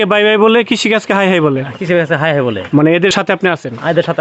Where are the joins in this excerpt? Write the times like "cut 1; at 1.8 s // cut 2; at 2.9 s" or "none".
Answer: cut 1; at 3.1 s